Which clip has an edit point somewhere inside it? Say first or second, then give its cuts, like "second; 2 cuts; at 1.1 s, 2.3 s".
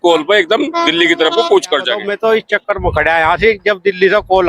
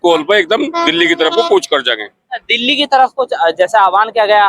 first; 1 cut; at 2.0 s